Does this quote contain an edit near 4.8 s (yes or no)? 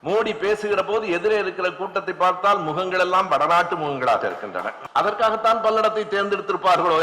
yes